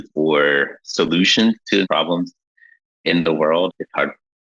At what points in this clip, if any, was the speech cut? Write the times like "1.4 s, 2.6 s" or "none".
1.8 s, 3.7 s